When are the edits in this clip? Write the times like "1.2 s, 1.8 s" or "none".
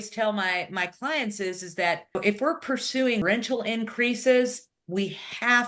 2.2 s, 3.2 s